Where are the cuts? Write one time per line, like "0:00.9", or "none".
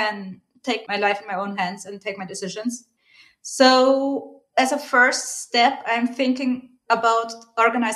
none